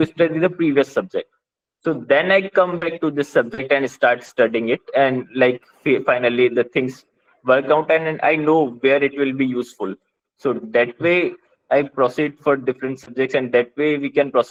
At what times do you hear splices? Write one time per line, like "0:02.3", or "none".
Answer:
none